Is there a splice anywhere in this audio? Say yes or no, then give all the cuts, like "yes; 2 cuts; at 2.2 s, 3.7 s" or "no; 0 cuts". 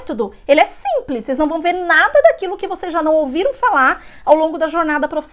no; 0 cuts